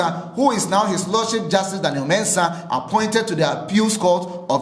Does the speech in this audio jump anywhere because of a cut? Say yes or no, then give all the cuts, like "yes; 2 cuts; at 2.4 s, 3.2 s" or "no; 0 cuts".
no; 0 cuts